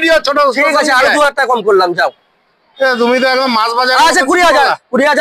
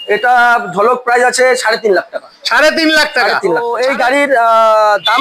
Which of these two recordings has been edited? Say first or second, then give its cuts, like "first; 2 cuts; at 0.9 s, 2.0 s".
second; 1 cut; at 3.7 s